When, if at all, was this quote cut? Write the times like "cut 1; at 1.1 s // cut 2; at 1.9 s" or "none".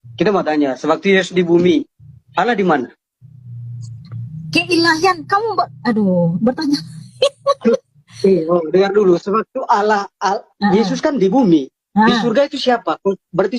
none

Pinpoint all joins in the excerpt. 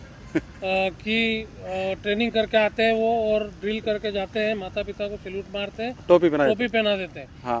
none

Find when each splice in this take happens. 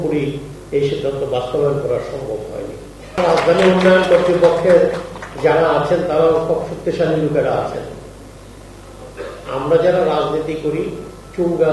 cut 1; at 3.2 s

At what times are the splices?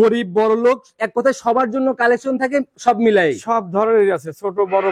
none

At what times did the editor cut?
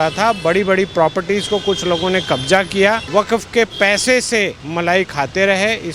cut 1; at 3.0 s // cut 2; at 4.6 s

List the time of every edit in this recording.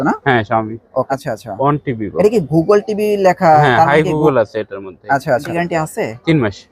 cut 1; at 1.1 s // cut 2; at 5.5 s

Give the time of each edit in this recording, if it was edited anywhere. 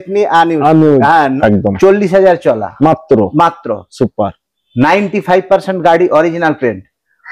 cut 1; at 1.3 s

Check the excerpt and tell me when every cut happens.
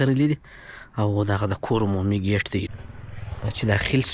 cut 1; at 2.7 s

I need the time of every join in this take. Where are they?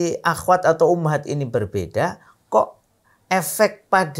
none

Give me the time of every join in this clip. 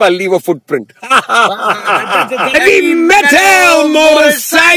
cut 1; at 2.5 s

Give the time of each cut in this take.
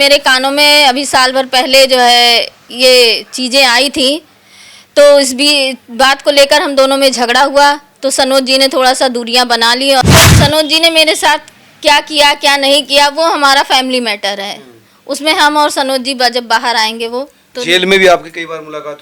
cut 1; at 10.0 s

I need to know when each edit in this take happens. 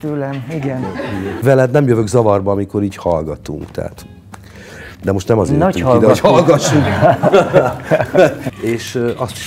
cut 1; at 1.4 s // cut 2; at 8.4 s

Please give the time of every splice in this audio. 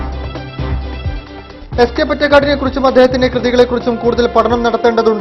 none

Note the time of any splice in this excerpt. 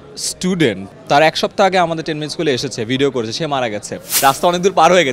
cut 1; at 0.9 s // cut 2; at 4.0 s

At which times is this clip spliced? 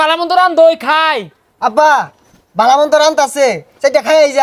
none

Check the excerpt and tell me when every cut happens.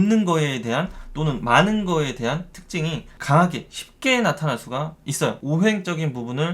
cut 1; at 3.1 s // cut 2; at 5.4 s

